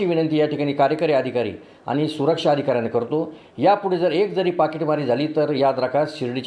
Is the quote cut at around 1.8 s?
no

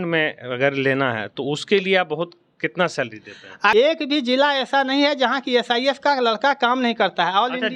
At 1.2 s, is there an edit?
no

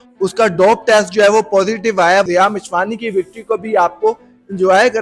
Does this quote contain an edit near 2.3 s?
yes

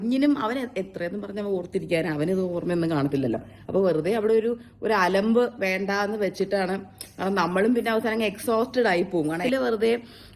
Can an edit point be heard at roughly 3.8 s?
no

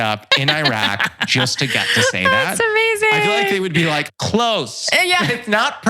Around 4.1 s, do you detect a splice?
yes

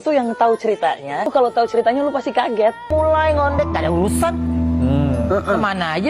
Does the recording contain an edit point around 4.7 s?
no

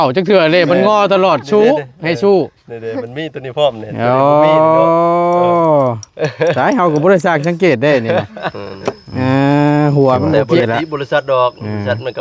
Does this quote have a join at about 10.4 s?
yes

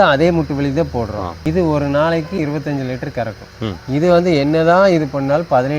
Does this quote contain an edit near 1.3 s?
yes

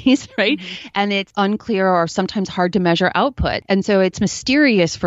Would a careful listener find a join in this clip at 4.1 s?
yes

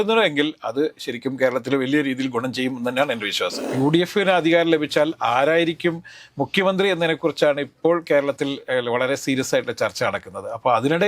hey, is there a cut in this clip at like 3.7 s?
yes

